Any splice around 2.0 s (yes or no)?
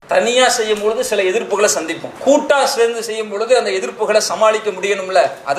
yes